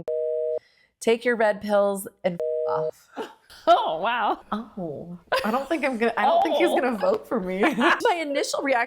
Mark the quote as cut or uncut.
cut